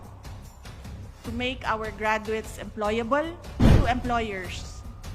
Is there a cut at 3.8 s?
yes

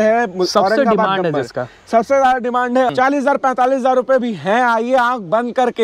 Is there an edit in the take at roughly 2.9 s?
yes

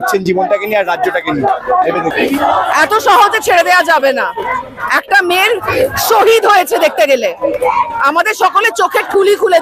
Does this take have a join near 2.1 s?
yes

